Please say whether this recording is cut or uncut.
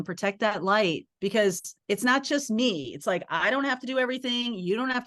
cut